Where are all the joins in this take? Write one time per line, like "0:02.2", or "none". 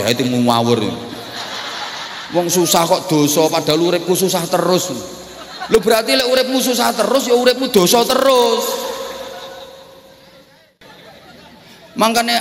0:10.8